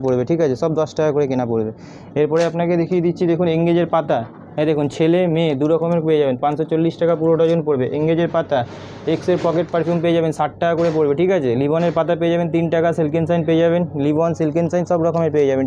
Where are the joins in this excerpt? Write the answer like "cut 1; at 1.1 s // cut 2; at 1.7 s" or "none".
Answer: none